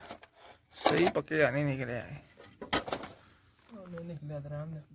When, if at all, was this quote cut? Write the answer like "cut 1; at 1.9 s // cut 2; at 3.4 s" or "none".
none